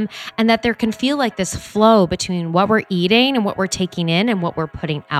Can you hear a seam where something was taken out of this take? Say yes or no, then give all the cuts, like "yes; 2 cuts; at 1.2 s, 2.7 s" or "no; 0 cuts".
no; 0 cuts